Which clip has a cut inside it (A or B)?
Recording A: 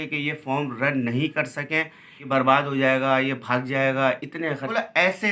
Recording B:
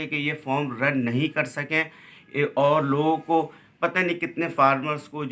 A